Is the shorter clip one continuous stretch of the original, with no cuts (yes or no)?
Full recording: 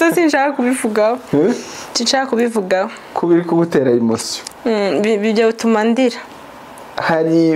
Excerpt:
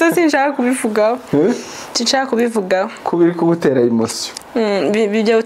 no